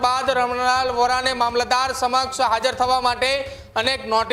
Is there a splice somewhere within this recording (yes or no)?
no